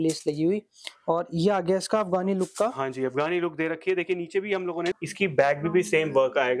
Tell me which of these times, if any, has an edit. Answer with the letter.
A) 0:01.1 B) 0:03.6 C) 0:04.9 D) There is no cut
C